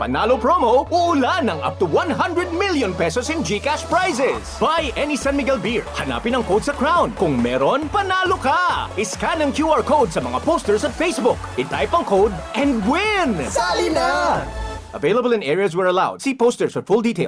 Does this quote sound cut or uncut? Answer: uncut